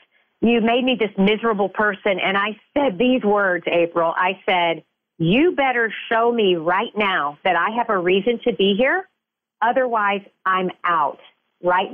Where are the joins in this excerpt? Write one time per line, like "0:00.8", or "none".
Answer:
none